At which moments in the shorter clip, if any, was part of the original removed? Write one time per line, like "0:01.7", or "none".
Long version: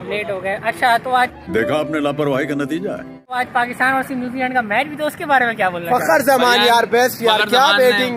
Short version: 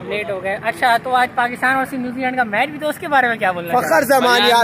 0:01.3